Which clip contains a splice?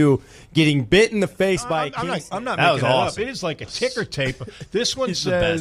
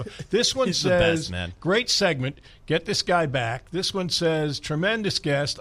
first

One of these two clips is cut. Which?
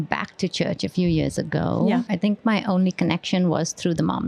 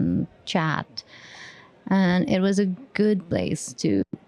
first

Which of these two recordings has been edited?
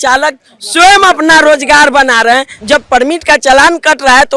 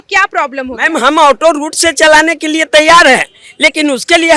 first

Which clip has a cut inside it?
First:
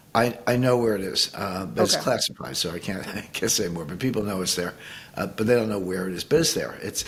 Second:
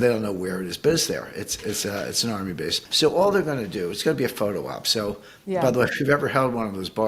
second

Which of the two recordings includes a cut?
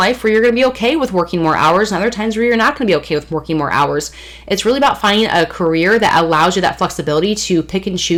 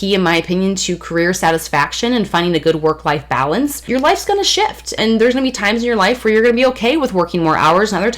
second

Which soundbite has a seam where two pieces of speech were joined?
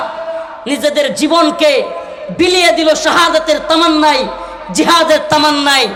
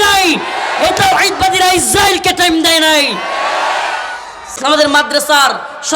second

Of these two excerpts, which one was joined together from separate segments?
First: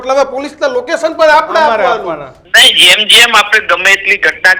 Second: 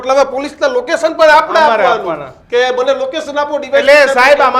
first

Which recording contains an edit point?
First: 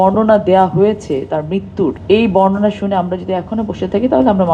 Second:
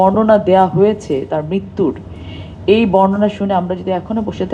first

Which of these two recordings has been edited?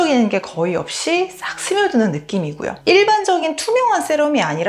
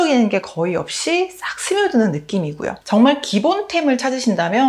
first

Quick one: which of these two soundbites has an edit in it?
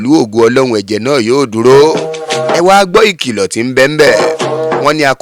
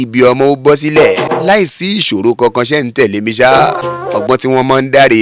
second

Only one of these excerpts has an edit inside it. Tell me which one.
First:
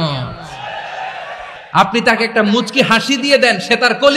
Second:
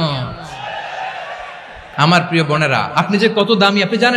first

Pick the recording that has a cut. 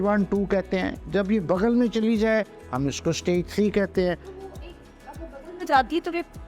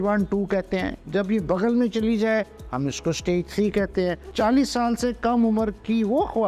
second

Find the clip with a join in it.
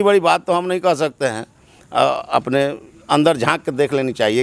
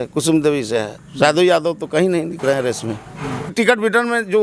second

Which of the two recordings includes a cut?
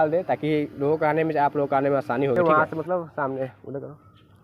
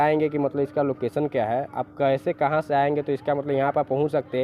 first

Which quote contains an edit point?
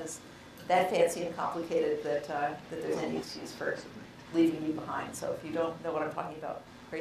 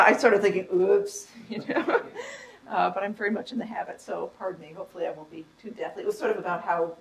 second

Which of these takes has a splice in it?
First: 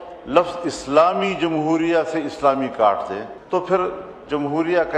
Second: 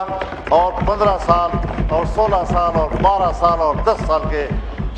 first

